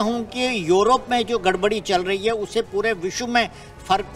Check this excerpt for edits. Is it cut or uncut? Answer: uncut